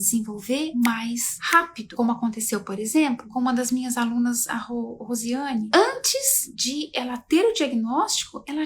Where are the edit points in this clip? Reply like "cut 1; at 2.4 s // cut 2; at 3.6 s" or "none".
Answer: cut 1; at 1.9 s // cut 2; at 5.7 s